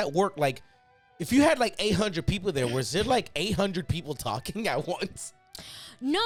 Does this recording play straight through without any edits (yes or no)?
yes